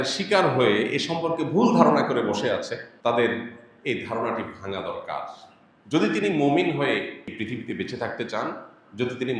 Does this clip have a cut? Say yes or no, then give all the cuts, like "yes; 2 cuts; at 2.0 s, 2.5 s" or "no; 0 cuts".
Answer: yes; 2 cuts; at 2.9 s, 7.3 s